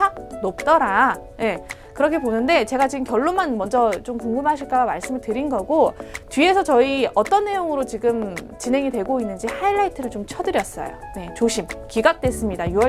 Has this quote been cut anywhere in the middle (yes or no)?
no